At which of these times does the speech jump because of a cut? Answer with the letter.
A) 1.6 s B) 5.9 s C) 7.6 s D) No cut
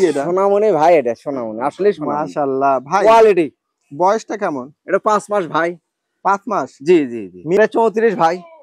C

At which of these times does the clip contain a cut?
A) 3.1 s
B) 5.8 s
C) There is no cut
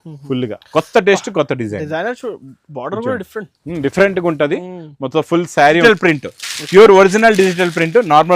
B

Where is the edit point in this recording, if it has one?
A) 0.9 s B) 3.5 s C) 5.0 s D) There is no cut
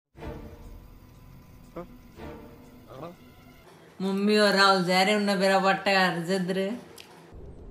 D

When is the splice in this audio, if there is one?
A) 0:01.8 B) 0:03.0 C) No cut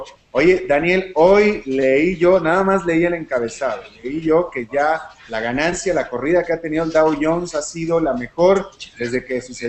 A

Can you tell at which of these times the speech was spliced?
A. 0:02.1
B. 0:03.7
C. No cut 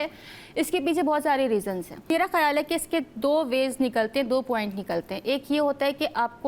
A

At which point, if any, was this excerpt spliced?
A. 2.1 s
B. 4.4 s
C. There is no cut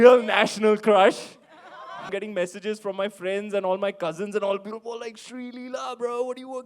A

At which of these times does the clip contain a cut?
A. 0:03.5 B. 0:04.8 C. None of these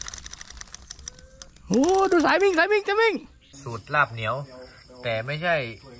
A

